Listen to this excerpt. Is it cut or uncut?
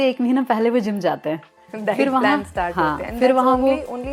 uncut